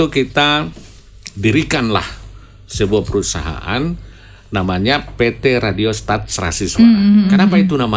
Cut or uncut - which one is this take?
uncut